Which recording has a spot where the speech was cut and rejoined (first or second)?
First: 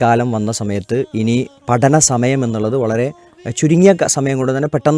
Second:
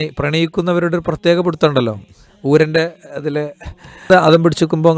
second